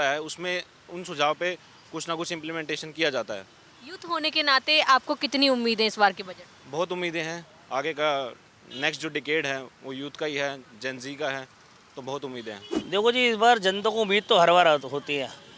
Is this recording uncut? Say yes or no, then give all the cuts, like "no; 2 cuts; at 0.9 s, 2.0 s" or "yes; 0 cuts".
yes; 0 cuts